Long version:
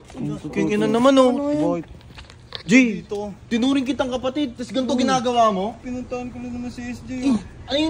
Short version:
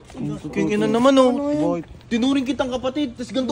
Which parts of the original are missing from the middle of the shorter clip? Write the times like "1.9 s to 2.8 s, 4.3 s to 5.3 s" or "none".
2.0 s to 3.4 s